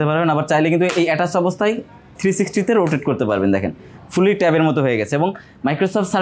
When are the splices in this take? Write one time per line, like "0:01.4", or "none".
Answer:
none